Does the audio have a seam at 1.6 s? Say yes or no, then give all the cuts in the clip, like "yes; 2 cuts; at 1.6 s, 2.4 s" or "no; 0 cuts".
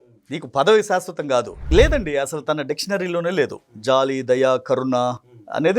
yes; 1 cut; at 1.6 s